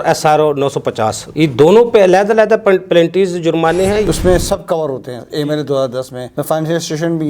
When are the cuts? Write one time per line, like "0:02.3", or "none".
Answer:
0:01.3
0:04.1

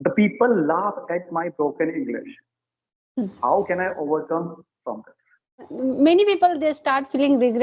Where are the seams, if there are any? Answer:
0:05.7

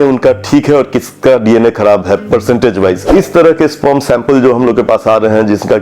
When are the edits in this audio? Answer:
0:03.0

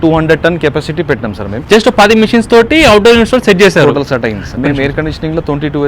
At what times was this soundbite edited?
0:01.6
0:04.5

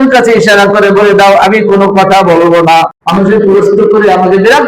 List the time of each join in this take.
0:03.0

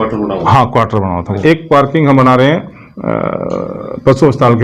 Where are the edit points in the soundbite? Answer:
0:01.4

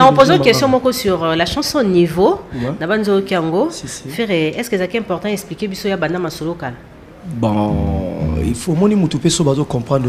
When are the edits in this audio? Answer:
none

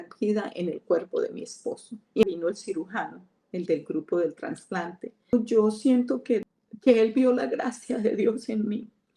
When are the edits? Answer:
0:02.2
0:05.3
0:06.5

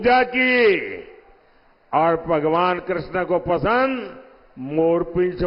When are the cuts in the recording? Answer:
none

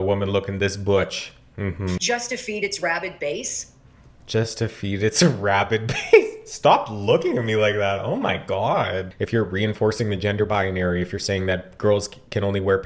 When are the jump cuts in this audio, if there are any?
0:02.0
0:09.1

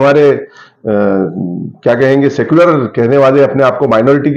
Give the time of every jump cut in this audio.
none

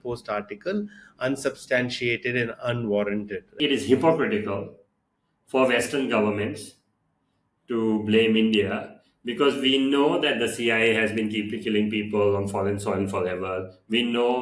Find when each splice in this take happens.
0:03.6

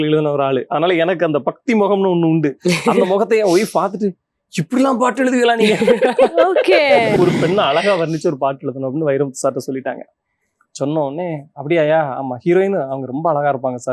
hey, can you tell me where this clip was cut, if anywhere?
0:07.2

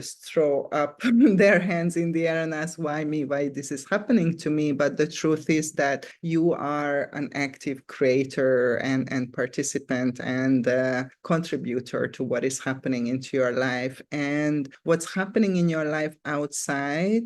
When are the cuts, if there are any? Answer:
none

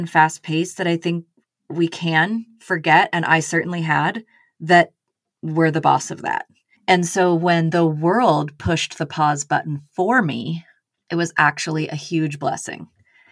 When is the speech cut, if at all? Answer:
none

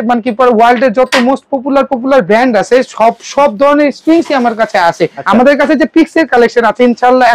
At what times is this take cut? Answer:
0:05.2

